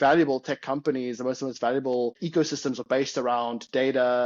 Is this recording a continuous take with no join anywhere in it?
no; 1 cut; at 2.2 s

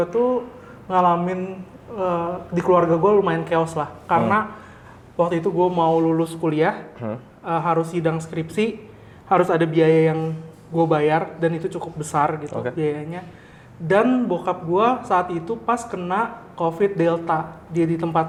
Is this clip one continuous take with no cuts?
yes; 0 cuts

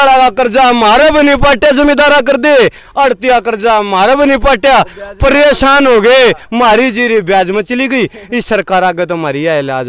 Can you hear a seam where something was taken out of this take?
no; 0 cuts

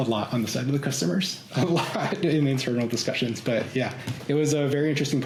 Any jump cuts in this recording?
no; 0 cuts

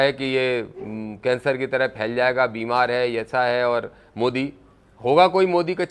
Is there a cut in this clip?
no; 0 cuts

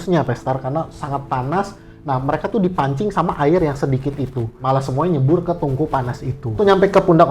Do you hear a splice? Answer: yes; 2 cuts; at 4.5 s, 6.6 s

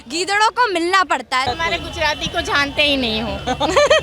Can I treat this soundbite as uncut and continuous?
no; 1 cut; at 1.5 s

